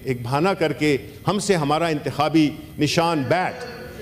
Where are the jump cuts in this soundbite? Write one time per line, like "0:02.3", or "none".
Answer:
none